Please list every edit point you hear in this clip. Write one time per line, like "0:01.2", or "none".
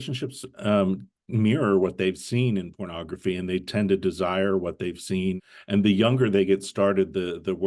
0:05.4